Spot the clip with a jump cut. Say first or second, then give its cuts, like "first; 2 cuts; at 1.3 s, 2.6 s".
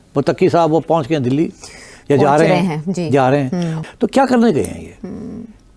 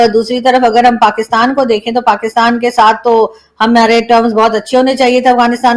first; 1 cut; at 3.8 s